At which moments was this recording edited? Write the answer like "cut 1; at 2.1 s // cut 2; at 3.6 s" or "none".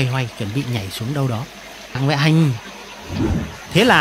cut 1; at 2.0 s